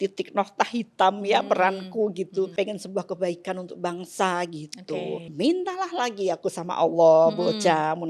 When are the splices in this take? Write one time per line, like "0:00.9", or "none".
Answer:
0:02.5
0:05.3